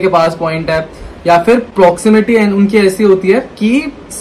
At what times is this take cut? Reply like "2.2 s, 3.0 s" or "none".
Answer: none